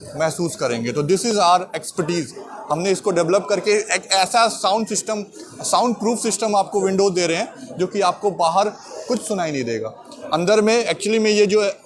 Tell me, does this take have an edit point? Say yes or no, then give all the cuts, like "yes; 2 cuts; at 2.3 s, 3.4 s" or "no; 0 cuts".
no; 0 cuts